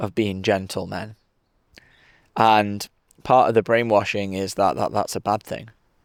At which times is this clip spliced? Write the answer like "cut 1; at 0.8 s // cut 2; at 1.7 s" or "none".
none